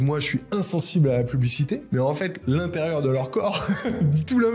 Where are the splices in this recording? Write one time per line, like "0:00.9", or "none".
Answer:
0:01.8